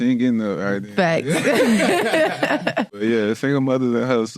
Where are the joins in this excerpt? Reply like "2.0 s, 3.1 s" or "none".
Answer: 2.9 s